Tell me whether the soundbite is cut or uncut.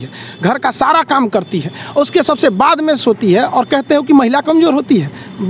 uncut